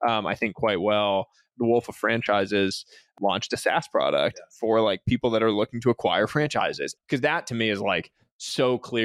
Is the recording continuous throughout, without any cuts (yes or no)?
no